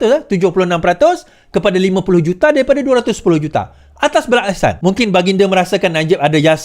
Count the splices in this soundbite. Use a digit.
1